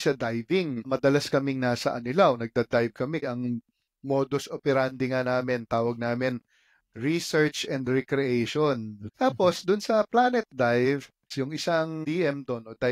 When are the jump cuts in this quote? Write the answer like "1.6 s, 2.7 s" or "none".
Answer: 3.2 s, 9.0 s, 11.3 s, 12.0 s